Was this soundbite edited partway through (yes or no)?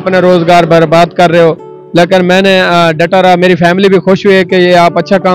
no